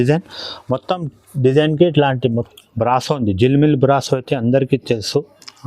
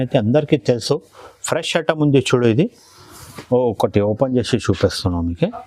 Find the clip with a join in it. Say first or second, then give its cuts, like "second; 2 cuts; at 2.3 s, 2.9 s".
first; 1 cut; at 2.4 s